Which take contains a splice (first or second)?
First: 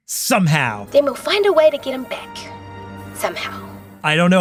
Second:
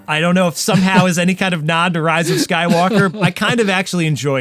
second